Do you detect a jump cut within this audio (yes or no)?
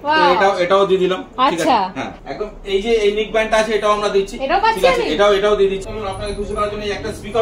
yes